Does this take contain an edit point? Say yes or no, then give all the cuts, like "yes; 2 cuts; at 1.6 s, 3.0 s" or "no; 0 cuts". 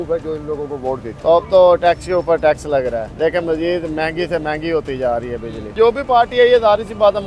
yes; 3 cuts; at 1.1 s, 3.1 s, 5.8 s